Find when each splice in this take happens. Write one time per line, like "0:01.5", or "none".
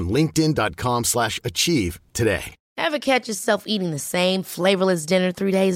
0:02.6

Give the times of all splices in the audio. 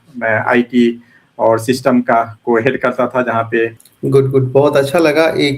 0:03.9

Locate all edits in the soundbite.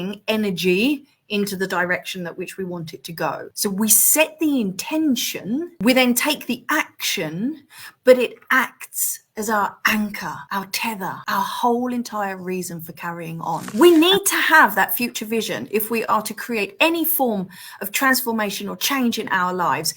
0:13.7

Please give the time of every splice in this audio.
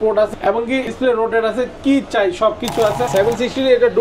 0:00.8
0:03.1

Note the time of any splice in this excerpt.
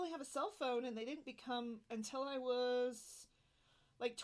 0:01.9

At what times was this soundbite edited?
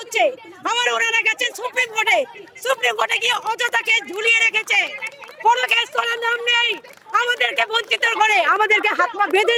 none

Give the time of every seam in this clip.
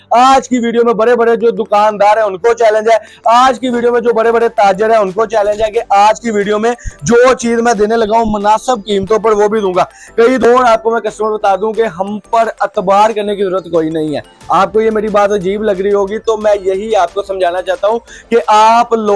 0:10.4

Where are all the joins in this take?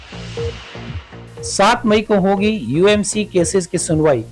0:01.5

